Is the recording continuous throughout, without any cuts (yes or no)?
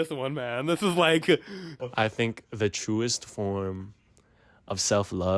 no